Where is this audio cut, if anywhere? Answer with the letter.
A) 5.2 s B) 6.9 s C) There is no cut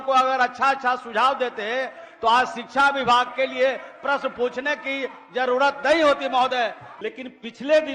B